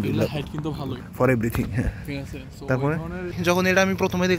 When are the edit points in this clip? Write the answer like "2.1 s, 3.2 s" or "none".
3.3 s